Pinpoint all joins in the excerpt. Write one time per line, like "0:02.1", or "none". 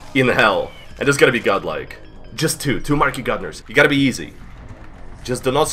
0:03.5

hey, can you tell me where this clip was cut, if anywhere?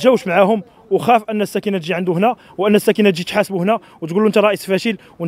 none

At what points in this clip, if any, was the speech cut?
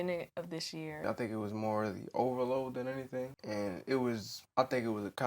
0:01.0
0:03.4
0:04.3

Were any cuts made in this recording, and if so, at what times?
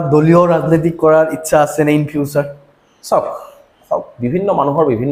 none

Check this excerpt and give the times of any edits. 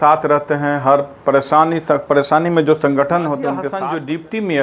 0:03.7

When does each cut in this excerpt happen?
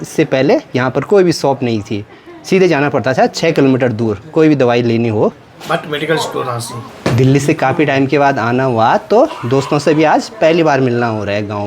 none

